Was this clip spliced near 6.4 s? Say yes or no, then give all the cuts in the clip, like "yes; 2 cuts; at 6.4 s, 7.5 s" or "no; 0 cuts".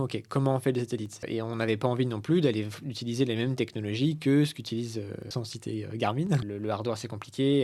yes; 3 cuts; at 1.2 s, 5.3 s, 6.4 s